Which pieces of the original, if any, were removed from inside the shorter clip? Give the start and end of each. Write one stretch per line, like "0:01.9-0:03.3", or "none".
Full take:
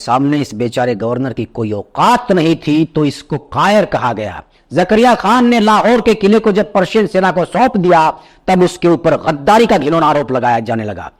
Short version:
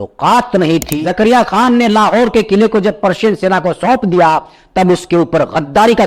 0:02.7-0:04.6